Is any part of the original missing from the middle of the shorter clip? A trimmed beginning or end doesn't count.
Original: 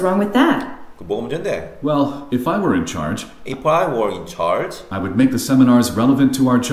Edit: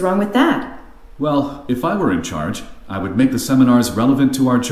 yes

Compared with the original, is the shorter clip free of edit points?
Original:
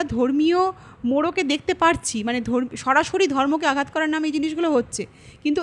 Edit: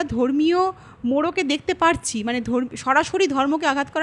yes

